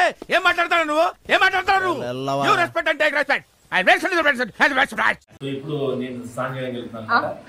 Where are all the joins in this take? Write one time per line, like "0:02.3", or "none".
0:05.3